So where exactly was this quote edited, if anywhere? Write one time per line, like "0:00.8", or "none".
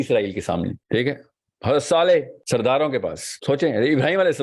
0:00.8
0:02.4
0:03.3